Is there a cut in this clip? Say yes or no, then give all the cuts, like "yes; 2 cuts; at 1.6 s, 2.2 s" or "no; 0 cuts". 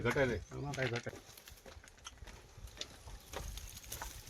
yes; 1 cut; at 1.0 s